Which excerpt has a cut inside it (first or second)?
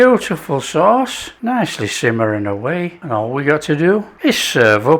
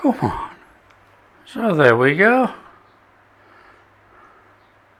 first